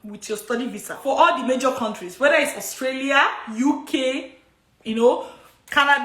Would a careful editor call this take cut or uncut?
cut